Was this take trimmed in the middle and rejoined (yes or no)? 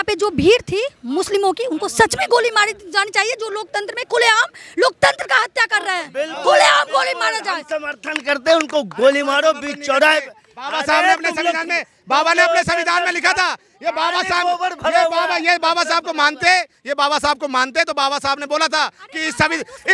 no